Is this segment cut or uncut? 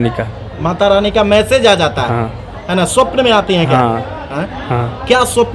uncut